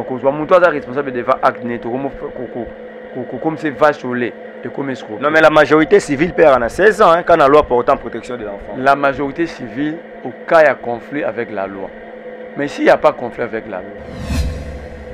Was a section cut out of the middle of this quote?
no; 0 cuts

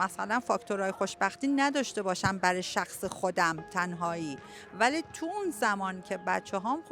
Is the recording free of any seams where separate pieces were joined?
yes; 0 cuts

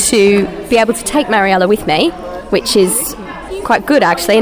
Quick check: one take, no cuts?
no; 1 cut; at 3.4 s

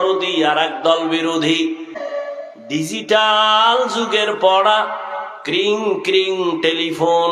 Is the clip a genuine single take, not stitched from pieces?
no; 1 cut; at 2.0 s

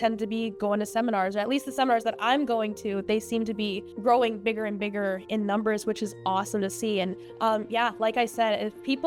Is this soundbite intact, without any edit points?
no; 2 cuts; at 3.9 s, 7.2 s

